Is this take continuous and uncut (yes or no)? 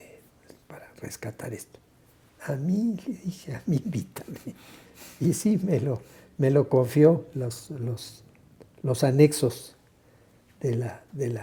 yes